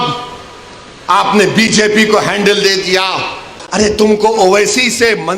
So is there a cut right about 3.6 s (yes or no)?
yes